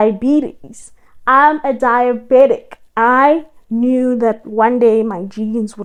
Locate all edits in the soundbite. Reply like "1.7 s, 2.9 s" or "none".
none